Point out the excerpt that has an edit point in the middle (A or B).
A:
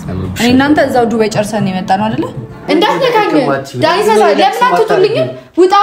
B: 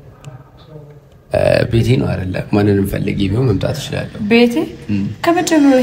A